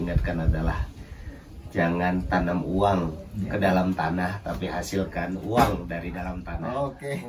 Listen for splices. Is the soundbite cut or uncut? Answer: uncut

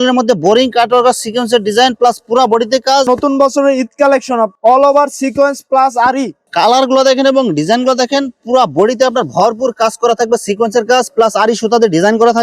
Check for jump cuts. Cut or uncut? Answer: cut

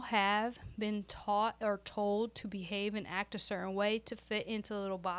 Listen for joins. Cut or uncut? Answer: uncut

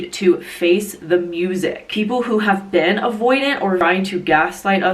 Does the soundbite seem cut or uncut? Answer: cut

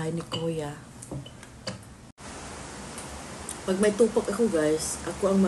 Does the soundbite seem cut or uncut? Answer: cut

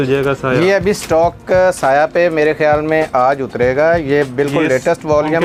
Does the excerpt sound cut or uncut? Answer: uncut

